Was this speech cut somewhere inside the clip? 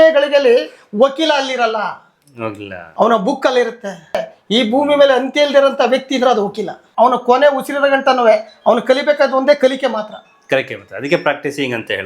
yes; 2 cuts; at 4.3 s, 6.8 s

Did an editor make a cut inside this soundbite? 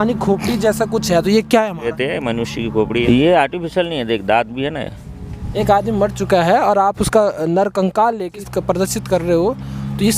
yes; 4 cuts; at 1.9 s, 3.0 s, 5.5 s, 8.4 s

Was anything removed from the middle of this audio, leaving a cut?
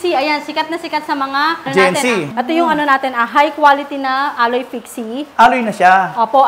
yes; 2 cuts; at 1.7 s, 2.3 s

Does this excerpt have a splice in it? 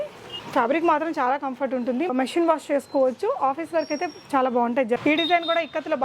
yes; 2 cuts; at 2.1 s, 5.0 s

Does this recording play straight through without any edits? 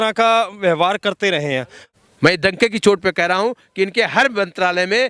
no; 1 cut; at 1.8 s

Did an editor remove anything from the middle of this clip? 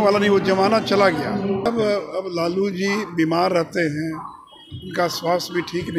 yes; 1 cut; at 1.6 s

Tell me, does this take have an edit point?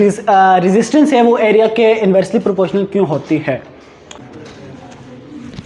yes; 1 cut; at 4.2 s

